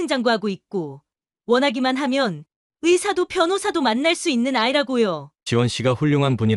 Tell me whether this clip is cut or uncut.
cut